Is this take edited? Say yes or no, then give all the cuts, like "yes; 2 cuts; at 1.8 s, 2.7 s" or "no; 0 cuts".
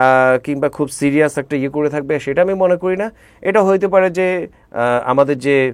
yes; 1 cut; at 4.6 s